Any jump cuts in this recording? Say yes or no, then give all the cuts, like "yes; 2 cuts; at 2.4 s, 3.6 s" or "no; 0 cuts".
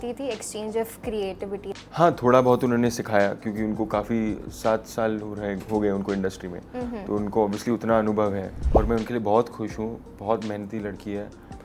yes; 2 cuts; at 1.7 s, 8.6 s